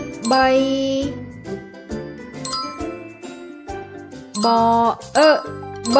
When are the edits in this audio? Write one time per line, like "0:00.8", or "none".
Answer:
0:01.1
0:04.2